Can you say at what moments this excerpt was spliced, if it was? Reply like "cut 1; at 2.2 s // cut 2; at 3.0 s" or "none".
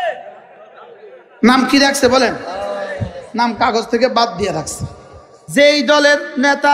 cut 1; at 5.4 s